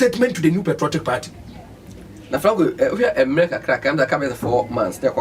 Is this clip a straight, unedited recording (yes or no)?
yes